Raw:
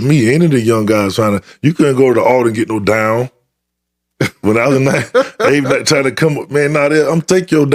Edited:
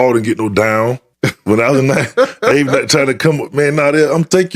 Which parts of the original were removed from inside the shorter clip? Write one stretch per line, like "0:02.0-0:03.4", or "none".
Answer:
0:03.4-0:04.1